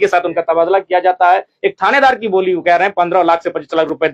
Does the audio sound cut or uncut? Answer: uncut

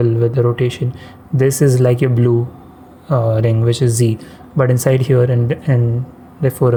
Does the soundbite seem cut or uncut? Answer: uncut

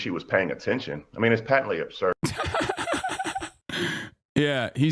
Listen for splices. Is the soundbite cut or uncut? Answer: cut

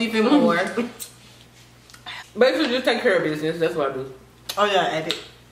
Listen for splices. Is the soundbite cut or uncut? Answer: cut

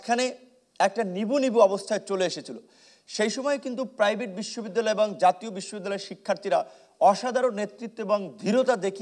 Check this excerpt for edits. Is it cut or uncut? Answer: uncut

